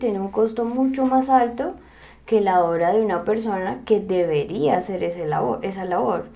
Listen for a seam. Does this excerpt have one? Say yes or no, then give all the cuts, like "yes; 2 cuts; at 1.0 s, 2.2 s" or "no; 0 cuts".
no; 0 cuts